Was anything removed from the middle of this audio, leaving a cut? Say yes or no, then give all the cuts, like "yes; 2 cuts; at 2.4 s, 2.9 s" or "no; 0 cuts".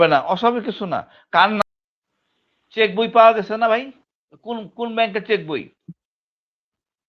yes; 1 cut; at 1.6 s